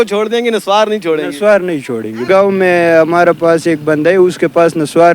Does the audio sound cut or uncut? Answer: cut